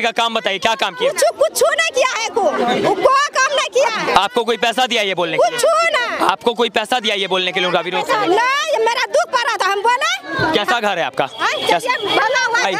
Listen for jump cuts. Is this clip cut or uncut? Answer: uncut